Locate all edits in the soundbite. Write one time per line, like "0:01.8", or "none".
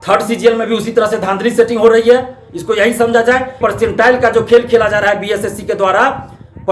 0:03.6